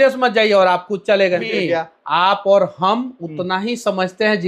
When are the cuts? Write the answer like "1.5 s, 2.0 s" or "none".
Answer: 1.5 s